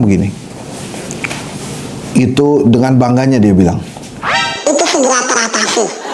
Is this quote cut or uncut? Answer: uncut